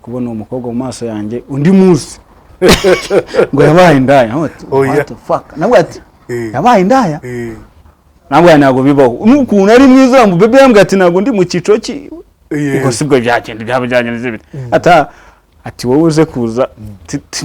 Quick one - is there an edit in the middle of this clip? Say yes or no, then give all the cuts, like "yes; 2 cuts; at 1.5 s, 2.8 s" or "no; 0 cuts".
yes; 1 cut; at 2.4 s